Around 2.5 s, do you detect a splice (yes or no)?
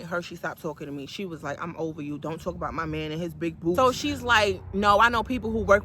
no